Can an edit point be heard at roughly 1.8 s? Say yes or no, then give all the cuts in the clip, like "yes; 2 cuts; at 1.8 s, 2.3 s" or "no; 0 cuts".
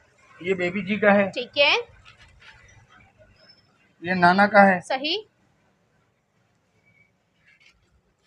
no; 0 cuts